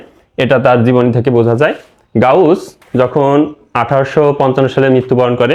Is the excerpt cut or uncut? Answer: uncut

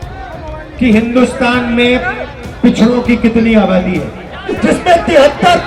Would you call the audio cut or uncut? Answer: cut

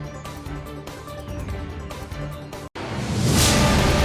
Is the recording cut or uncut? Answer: cut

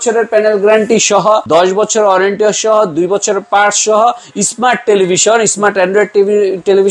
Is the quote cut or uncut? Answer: cut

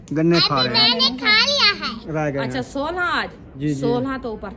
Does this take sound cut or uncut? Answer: cut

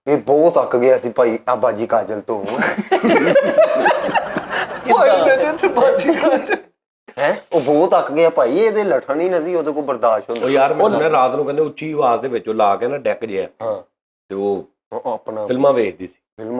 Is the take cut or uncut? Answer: uncut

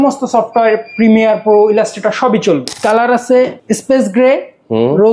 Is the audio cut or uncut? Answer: cut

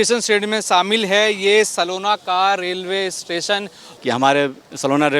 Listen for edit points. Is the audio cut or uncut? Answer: cut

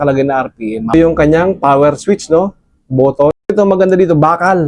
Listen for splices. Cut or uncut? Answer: cut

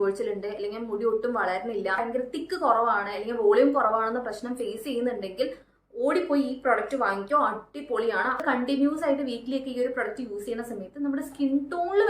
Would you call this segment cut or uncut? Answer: cut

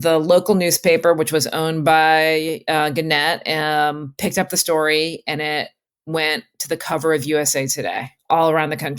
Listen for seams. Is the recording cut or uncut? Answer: cut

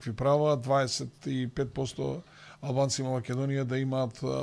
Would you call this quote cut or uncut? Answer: uncut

